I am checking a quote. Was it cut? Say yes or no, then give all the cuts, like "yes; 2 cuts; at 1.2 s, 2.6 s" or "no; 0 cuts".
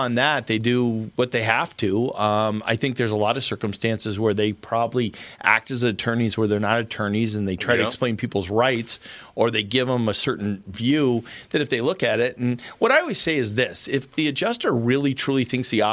no; 0 cuts